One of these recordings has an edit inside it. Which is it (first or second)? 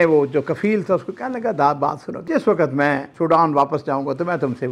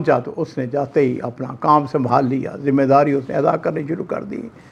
first